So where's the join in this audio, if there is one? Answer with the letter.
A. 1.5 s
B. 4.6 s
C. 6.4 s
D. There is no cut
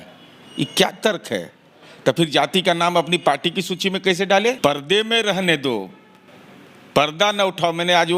B